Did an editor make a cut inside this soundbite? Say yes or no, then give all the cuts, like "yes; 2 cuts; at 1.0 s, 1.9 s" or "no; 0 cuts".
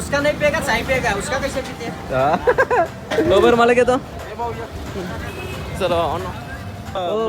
no; 0 cuts